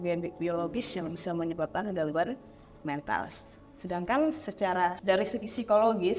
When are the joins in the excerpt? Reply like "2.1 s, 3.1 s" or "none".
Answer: 5.0 s